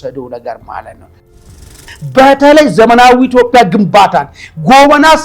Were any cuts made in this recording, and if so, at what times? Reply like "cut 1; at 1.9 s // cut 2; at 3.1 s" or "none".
cut 1; at 1.3 s

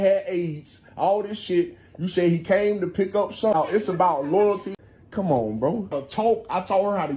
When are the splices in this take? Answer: cut 1; at 4.7 s // cut 2; at 5.9 s

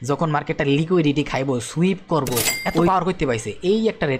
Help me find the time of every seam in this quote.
cut 1; at 2.9 s

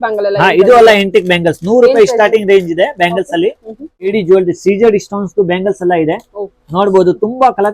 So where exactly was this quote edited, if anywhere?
cut 1; at 4.1 s

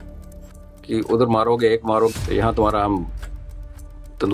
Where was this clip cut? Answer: cut 1; at 2.1 s

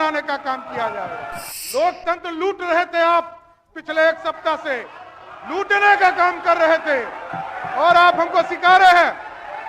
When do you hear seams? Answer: cut 1; at 1.5 s

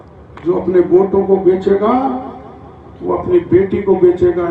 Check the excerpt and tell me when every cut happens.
none

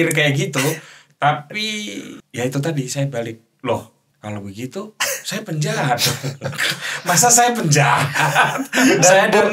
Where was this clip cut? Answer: cut 1; at 2.2 s // cut 2; at 4.0 s

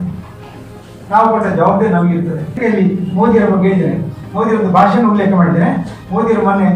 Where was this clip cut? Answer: cut 1; at 2.6 s

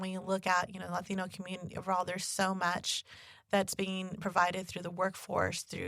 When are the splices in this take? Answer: none

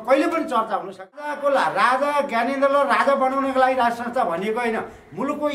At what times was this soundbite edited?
cut 1; at 1.3 s

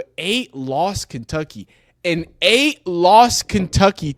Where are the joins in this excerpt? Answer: none

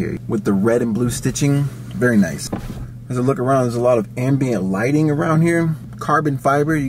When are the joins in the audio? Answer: cut 1; at 5.9 s

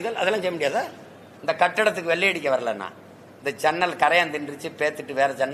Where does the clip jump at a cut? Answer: cut 1; at 1.3 s

